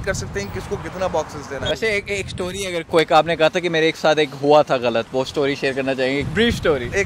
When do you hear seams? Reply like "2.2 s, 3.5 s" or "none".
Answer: 1.6 s, 6.3 s